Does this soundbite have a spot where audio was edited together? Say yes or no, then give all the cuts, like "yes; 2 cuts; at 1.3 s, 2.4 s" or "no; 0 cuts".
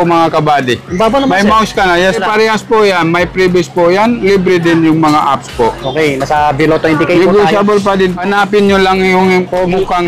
yes; 2 cuts; at 2.2 s, 8.2 s